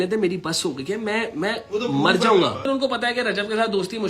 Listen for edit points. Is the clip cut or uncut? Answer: cut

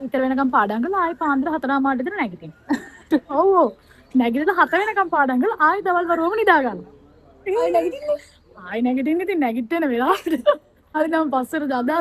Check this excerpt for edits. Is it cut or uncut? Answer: cut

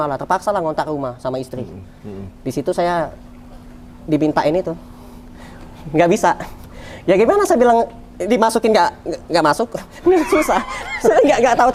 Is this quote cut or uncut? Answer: uncut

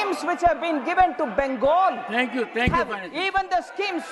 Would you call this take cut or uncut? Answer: uncut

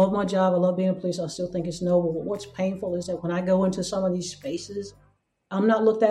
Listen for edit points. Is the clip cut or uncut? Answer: cut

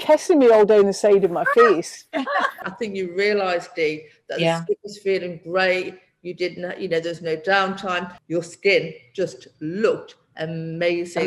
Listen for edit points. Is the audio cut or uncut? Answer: cut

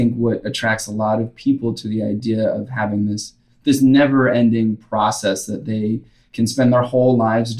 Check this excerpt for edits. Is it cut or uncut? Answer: uncut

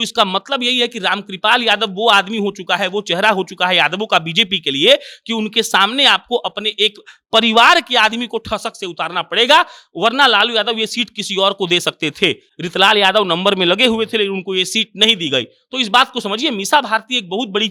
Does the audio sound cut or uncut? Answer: uncut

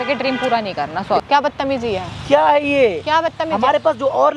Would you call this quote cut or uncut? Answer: cut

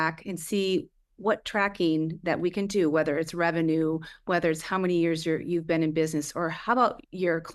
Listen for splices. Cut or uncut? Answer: uncut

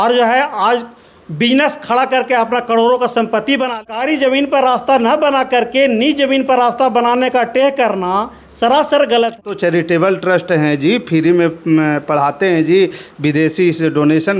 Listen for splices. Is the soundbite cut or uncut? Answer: cut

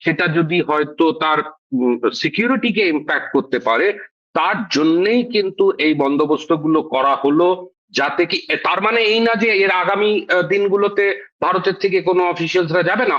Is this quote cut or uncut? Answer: uncut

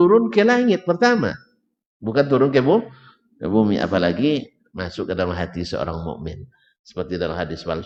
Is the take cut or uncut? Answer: uncut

